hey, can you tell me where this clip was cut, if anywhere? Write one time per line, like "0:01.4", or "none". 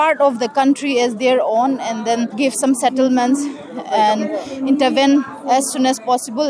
0:02.3
0:05.4